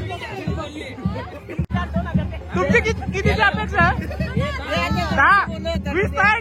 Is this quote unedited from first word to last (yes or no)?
no